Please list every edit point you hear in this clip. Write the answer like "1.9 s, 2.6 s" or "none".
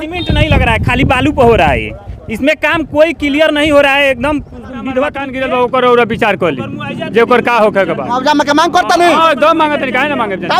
5.3 s